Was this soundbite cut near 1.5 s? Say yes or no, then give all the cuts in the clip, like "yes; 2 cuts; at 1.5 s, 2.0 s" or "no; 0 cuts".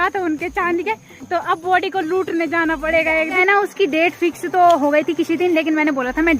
no; 1 cut; at 3.4 s